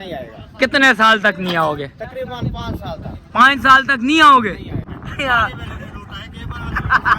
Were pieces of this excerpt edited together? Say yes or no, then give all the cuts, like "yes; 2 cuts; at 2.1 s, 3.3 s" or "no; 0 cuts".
yes; 1 cut; at 4.9 s